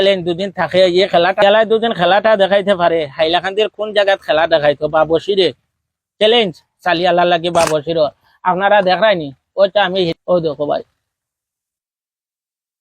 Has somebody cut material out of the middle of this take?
yes; 1 cut; at 10.1 s

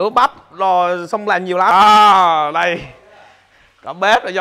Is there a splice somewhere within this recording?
yes; 1 cut; at 1.7 s

